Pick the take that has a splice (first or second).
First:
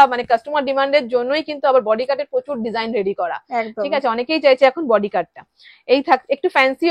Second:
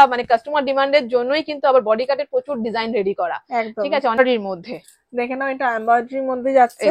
second